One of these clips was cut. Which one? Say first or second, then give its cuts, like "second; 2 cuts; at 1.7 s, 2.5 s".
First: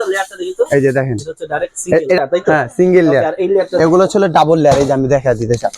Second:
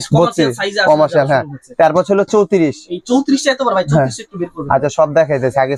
first; 1 cut; at 2.2 s